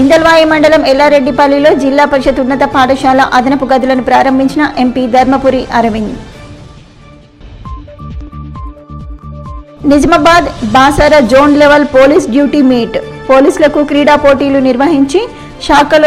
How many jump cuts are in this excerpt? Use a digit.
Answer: 0